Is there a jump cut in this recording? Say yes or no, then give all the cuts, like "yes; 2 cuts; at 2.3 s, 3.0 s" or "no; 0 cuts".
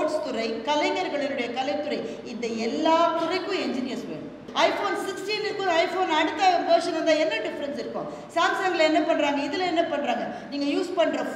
yes; 1 cut; at 4.5 s